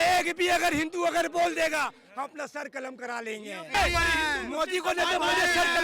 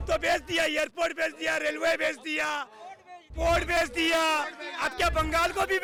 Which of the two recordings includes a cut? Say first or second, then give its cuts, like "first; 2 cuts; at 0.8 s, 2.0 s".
first; 1 cut; at 3.7 s